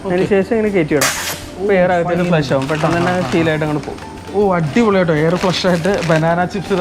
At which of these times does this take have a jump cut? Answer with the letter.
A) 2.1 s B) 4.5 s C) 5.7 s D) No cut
D